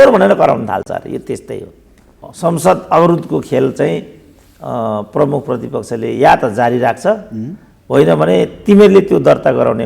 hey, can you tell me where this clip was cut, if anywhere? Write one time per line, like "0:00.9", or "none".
0:02.2